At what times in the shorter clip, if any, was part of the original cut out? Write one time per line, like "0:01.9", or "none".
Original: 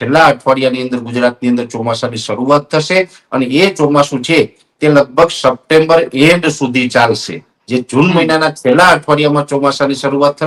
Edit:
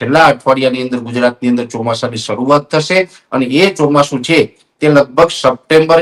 none